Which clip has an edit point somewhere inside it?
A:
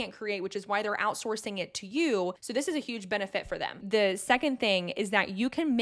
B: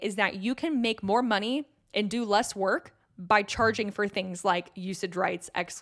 A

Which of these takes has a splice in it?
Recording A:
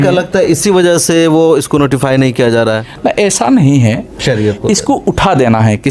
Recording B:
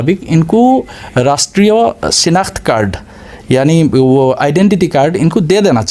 A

